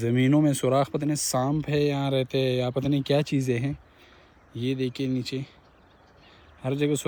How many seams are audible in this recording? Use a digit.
0